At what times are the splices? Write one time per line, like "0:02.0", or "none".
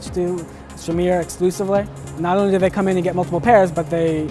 0:02.0